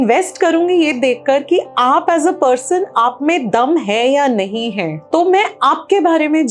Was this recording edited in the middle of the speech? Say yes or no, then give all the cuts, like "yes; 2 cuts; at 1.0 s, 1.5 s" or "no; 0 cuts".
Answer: no; 0 cuts